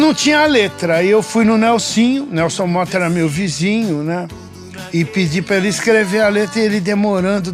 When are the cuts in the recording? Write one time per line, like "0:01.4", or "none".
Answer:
none

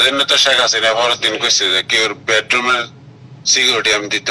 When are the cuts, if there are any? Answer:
none

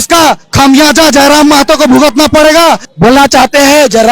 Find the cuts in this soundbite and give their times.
0:02.9

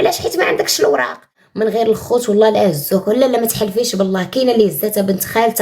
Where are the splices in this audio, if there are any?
0:01.4

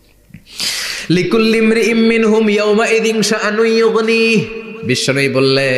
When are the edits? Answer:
none

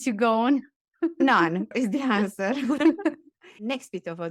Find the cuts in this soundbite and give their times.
none

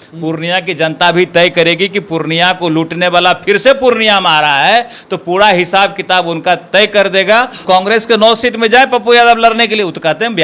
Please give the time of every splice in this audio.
0:07.6

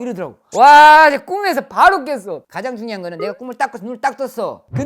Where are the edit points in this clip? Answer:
0:02.5

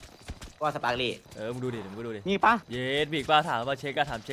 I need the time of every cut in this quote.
0:01.3
0:02.7

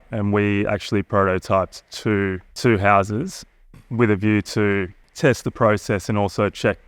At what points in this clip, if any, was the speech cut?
0:02.6
0:05.0

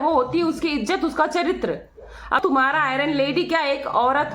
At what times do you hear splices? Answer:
0:02.4

